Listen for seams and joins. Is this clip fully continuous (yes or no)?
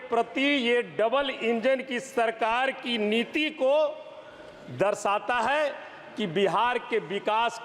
yes